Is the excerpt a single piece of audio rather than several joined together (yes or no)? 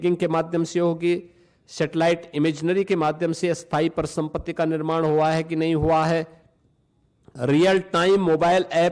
yes